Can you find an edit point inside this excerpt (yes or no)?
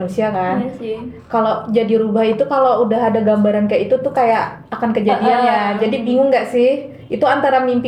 no